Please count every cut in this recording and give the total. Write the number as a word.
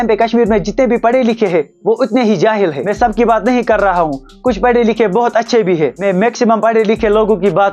zero